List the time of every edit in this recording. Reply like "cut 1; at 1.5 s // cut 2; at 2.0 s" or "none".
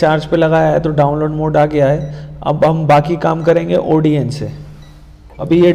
none